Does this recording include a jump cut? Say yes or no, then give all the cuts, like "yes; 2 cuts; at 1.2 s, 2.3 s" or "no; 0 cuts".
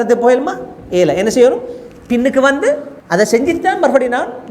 yes; 1 cut; at 2.9 s